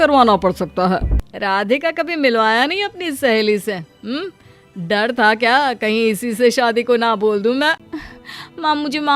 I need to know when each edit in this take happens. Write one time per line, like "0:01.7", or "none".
0:01.2
0:07.8